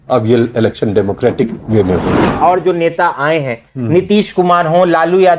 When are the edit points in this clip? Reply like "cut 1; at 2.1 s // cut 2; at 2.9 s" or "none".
cut 1; at 2.4 s